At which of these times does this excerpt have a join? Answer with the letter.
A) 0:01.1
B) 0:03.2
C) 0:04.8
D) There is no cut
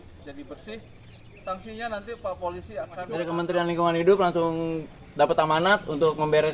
B